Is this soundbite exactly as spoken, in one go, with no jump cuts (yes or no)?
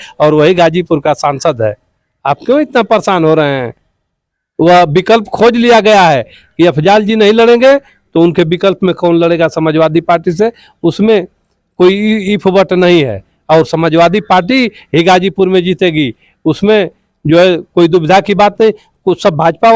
yes